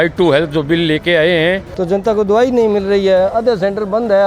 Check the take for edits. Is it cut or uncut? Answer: cut